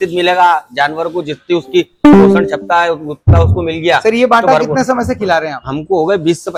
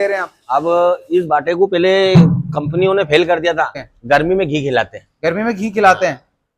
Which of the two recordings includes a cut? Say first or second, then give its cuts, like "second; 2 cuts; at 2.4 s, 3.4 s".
second; 1 cut; at 3.8 s